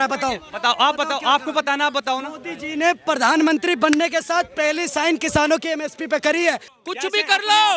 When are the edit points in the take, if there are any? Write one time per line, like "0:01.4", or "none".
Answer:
0:06.7

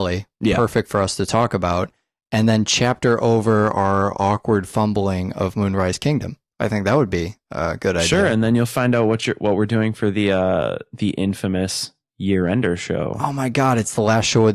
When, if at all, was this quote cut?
none

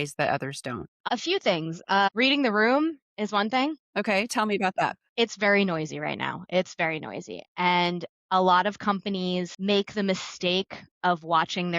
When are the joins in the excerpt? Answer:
0:01.0
0:03.8

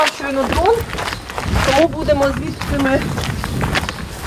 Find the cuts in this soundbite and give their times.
none

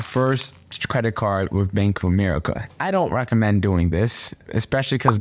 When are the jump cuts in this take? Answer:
0:02.7

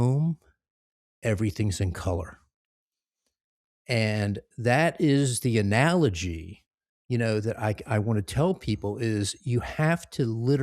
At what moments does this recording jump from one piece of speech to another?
none

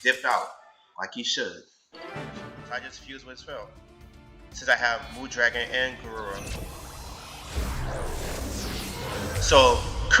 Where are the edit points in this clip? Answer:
0:02.5

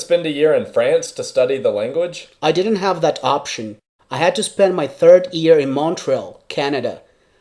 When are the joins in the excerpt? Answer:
0:02.2

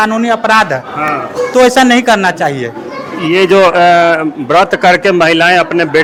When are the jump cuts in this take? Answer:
none

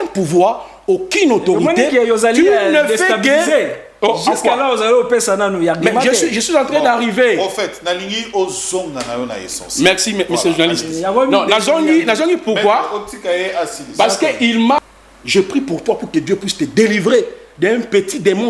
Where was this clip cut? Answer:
0:14.8

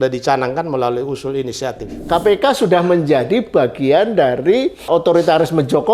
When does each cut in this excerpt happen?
0:02.0
0:04.9

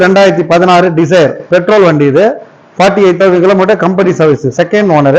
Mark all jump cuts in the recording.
none

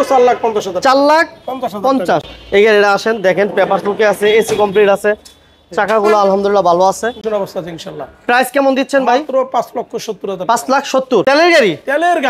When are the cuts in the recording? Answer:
0:02.3
0:07.2
0:11.2

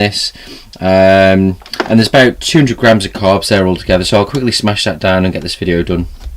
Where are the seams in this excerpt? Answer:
0:02.1

